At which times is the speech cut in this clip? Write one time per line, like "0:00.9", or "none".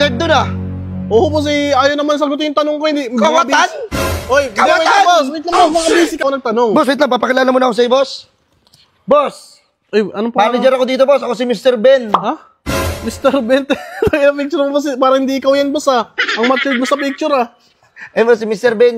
0:06.2